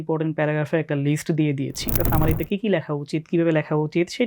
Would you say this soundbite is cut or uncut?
cut